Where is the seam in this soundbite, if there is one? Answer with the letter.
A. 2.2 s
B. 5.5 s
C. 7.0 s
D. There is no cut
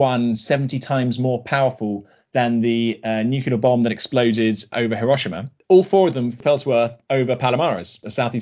B